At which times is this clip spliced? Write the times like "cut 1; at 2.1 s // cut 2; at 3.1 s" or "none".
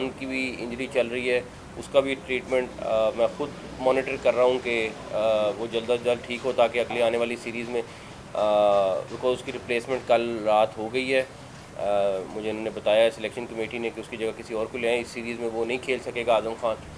none